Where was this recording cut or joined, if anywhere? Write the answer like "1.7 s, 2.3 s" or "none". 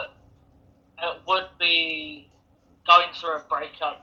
none